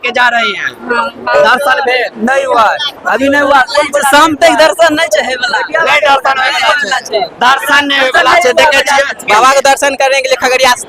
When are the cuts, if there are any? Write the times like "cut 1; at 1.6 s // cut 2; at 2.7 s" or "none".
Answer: cut 1; at 1.3 s // cut 2; at 9.2 s